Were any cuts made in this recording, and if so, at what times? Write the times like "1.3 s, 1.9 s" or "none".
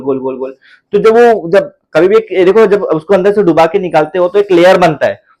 none